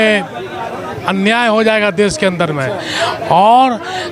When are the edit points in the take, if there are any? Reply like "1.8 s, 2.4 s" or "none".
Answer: none